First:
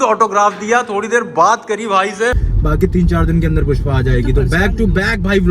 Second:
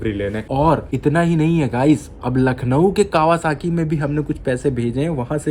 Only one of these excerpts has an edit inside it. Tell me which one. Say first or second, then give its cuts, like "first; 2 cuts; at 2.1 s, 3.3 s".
first; 1 cut; at 2.5 s